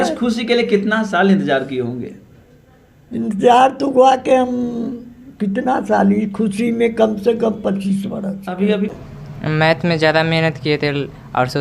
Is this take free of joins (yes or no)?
no